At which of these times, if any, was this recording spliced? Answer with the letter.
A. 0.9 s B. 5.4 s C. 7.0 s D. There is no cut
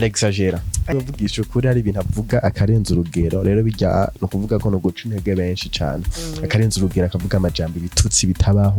A